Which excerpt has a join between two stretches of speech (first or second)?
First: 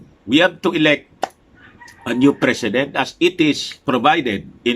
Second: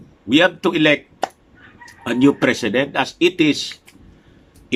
first